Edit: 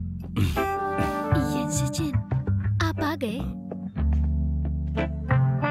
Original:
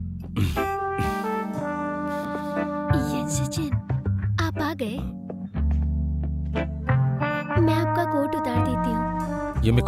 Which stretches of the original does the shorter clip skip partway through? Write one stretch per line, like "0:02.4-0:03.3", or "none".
0:01.1-0:02.7